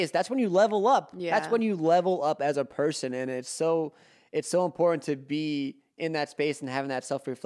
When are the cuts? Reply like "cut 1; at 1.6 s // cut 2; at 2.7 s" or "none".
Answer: none